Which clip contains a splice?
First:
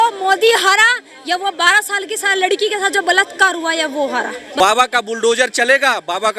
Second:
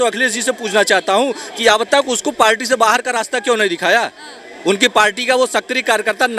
first; 1 cut; at 4.4 s

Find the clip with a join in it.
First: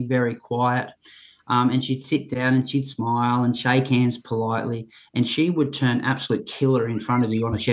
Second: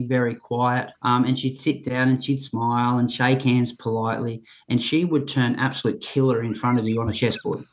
second; 1 cut; at 0.9 s

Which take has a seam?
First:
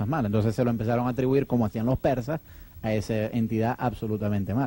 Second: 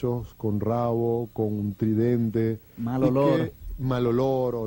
second; 1 cut; at 1.0 s

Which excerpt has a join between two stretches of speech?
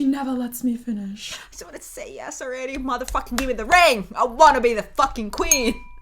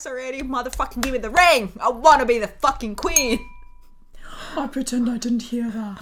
first; 1 cut; at 1.3 s

